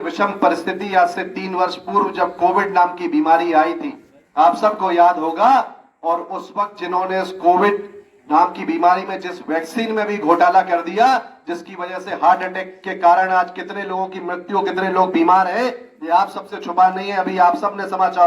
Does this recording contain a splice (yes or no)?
no